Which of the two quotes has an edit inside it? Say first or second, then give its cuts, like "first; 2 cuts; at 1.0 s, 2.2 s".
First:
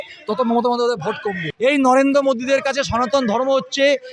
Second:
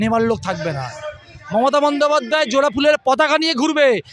first; 1 cut; at 1.4 s